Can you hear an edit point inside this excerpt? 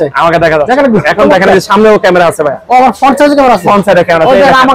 no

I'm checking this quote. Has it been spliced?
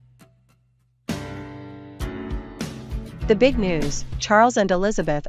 yes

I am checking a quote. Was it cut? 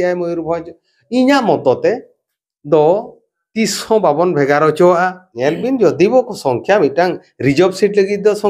yes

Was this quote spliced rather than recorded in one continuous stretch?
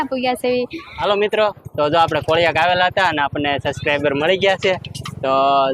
yes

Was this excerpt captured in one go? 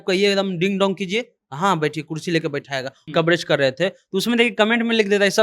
no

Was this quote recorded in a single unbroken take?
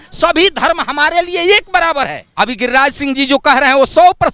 no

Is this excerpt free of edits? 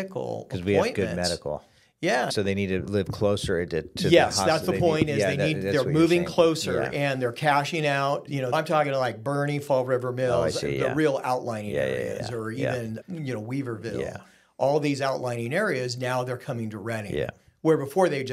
no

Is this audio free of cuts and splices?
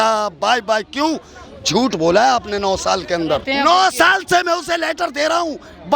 no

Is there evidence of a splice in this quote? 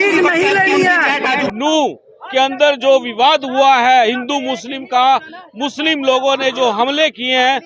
yes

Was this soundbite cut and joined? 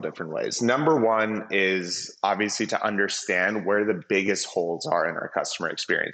no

